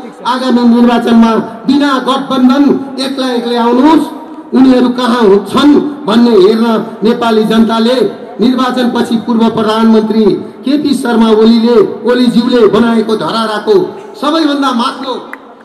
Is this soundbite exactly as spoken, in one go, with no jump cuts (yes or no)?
yes